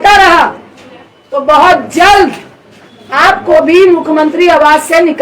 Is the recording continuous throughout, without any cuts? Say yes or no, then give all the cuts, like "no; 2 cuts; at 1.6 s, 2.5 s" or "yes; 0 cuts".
yes; 0 cuts